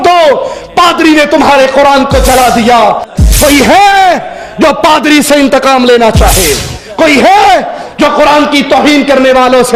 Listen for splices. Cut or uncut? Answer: cut